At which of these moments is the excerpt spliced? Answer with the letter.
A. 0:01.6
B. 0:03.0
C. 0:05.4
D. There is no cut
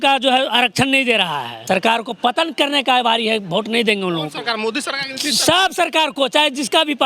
A